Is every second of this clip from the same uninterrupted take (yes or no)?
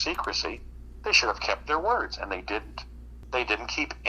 no